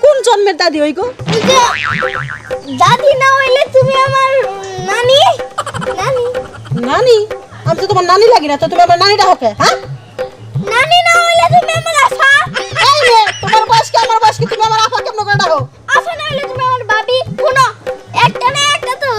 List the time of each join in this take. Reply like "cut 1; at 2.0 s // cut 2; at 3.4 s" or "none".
none